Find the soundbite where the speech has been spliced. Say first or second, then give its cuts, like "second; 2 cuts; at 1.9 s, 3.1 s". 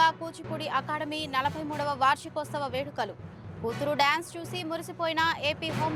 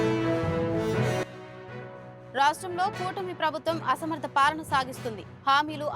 second; 1 cut; at 1.2 s